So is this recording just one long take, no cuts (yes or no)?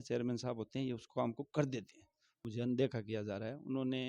no